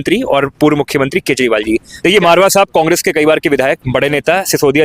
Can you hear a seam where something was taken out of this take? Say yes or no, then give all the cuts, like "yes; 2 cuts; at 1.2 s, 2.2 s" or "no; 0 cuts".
yes; 1 cut; at 1.9 s